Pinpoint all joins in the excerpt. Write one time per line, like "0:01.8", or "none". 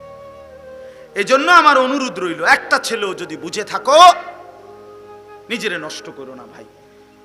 0:01.1